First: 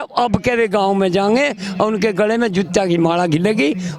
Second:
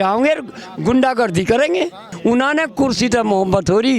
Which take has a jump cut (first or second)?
second